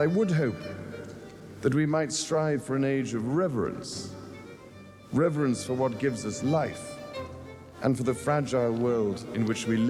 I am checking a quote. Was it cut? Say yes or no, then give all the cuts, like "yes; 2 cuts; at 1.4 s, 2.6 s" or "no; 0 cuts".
no; 0 cuts